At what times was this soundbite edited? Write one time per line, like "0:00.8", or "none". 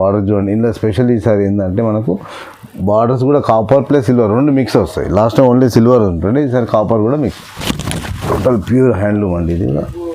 0:07.2